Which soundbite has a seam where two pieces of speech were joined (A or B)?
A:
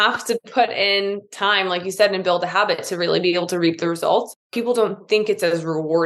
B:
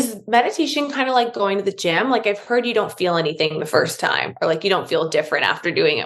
A